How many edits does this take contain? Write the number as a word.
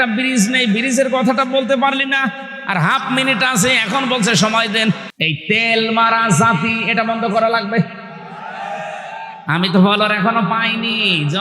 one